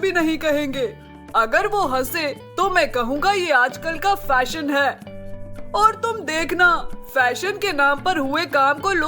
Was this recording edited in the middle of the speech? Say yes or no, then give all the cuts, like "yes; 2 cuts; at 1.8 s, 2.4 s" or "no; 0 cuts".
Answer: no; 0 cuts